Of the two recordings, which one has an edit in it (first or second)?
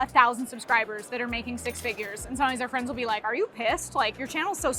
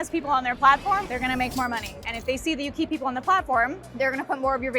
second